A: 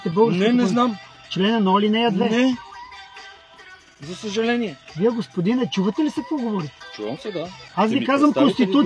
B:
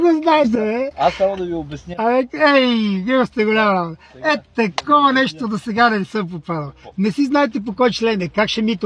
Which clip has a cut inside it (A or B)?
A